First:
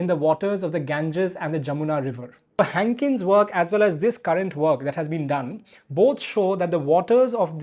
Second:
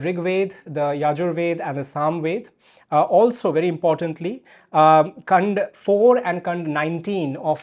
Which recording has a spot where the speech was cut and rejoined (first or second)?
first